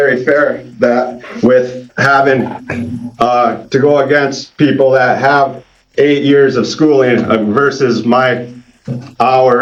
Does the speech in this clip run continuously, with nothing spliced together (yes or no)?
yes